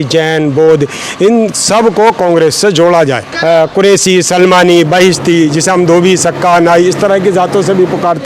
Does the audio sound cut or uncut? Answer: cut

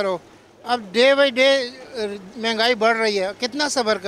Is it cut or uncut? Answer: uncut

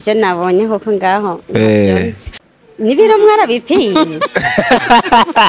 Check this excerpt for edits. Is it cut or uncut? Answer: cut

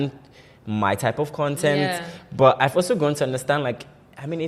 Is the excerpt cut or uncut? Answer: uncut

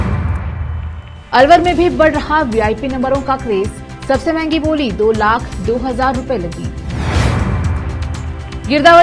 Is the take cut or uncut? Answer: cut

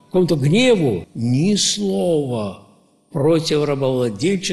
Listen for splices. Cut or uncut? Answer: cut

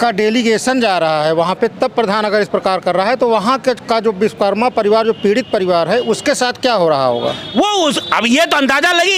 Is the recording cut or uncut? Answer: uncut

